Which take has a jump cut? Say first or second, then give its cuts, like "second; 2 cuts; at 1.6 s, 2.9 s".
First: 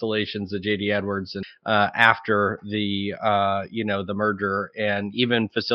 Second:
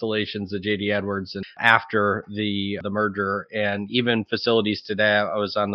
second; 2 cuts; at 1.6 s, 2.8 s